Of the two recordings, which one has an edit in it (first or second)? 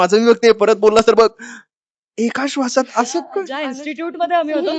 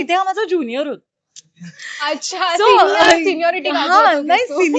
first